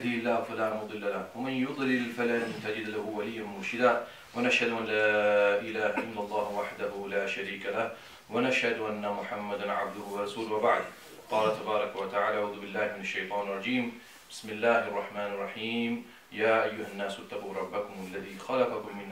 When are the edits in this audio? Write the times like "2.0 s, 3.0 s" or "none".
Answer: 5.7 s